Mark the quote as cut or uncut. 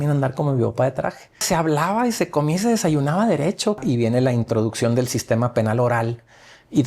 cut